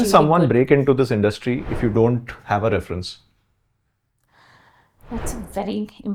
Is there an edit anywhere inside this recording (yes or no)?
no